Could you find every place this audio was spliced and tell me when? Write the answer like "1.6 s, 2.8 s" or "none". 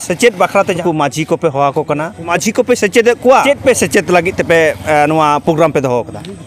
0.8 s, 2.3 s, 3.4 s